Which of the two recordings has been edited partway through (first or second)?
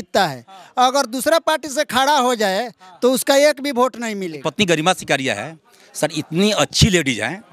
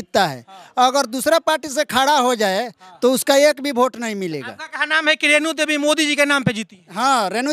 first